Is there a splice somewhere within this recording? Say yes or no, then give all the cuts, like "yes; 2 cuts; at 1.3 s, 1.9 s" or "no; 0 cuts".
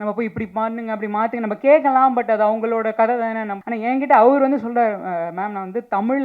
yes; 1 cut; at 3.5 s